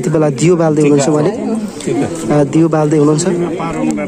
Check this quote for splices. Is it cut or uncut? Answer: uncut